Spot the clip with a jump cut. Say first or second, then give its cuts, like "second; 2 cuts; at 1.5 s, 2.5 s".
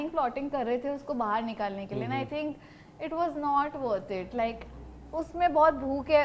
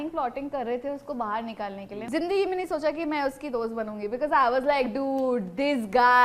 second; 1 cut; at 2.0 s